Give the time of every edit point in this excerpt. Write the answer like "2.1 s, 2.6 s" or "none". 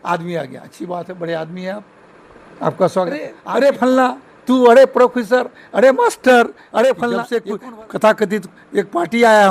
3.4 s, 7.3 s